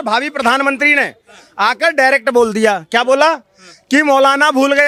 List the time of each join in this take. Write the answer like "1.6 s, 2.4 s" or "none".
none

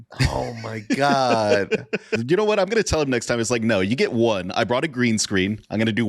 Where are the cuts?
2.2 s

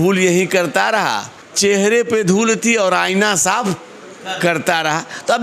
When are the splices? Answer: none

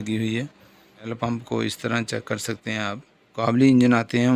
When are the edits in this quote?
1.1 s, 3.4 s

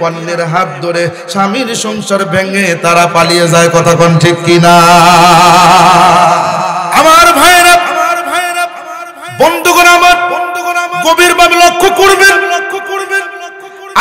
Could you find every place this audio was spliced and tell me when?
6.8 s

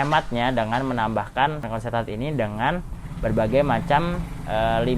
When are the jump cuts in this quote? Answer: 1.6 s

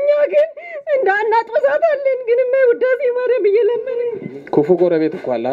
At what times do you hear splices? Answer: 4.2 s

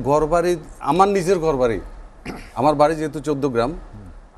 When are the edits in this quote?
none

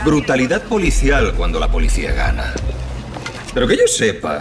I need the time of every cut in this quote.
3.5 s

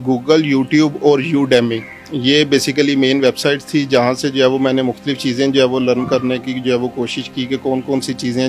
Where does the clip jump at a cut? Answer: none

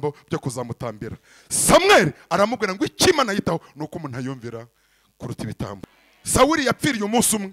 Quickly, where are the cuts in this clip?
5.8 s

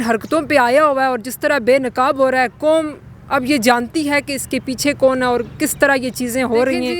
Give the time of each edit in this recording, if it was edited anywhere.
none

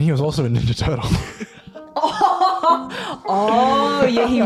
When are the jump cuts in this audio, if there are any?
none

